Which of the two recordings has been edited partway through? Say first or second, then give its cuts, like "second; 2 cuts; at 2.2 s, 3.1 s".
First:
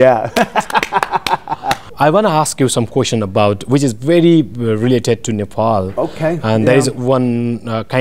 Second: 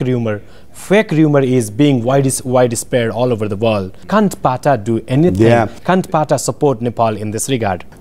first; 1 cut; at 1.9 s